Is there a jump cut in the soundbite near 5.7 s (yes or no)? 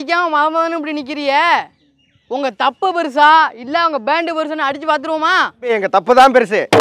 yes